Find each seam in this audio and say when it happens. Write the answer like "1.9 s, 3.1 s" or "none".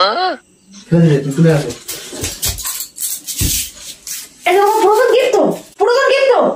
5.7 s